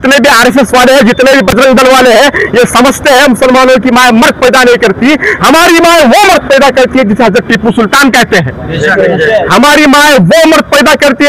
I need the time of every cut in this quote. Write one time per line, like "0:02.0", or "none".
none